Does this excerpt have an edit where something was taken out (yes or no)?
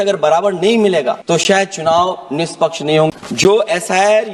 yes